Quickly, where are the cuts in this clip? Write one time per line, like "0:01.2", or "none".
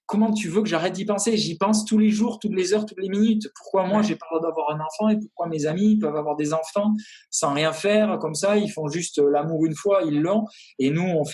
none